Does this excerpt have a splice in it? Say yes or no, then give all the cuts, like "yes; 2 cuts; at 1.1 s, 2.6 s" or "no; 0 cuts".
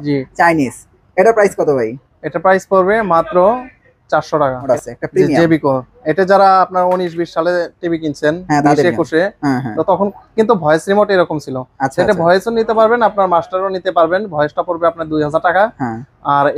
yes; 1 cut; at 4.7 s